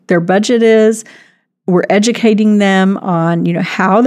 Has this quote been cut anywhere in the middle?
no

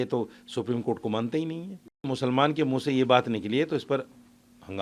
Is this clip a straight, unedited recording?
no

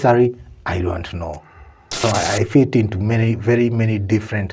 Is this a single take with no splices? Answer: no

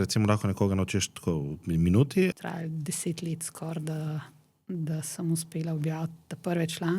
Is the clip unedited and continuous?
no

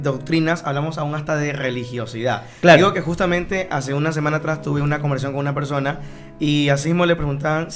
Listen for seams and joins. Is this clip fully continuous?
yes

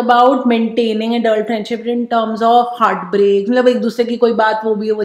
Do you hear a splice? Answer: no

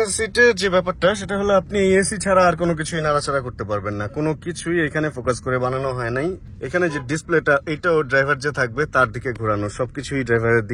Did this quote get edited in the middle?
no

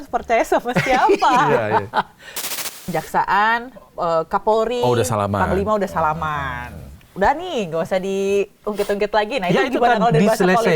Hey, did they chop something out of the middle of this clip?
yes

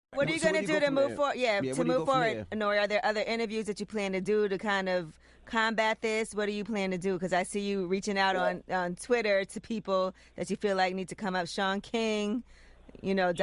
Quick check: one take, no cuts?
no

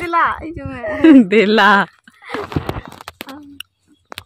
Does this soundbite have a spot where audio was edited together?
no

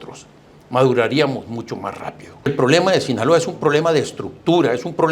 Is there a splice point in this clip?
yes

